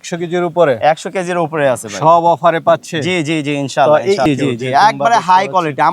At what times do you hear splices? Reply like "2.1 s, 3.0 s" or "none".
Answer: 4.3 s